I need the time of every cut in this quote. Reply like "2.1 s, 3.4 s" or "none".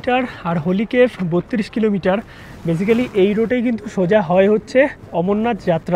none